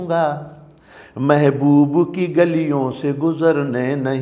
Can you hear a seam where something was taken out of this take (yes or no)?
no